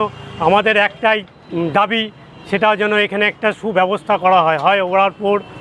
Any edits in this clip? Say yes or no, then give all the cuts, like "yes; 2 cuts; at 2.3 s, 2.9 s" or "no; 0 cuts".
yes; 1 cut; at 1.4 s